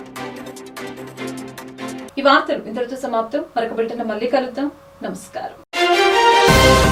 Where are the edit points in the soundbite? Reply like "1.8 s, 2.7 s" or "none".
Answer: none